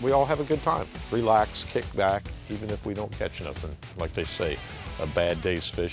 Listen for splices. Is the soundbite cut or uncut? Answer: cut